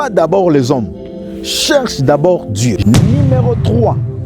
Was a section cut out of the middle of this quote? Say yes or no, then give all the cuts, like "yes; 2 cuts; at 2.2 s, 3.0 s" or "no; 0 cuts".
yes; 1 cut; at 2.8 s